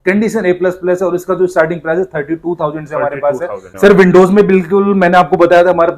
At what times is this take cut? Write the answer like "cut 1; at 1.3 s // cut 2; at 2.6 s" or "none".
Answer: cut 1; at 3.7 s